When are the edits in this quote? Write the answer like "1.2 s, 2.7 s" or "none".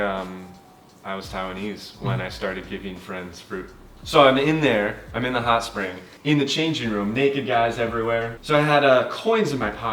3.9 s, 6.0 s, 8.4 s